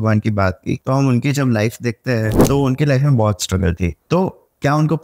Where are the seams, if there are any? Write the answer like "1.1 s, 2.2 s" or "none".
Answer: 0.8 s, 2.4 s, 4.0 s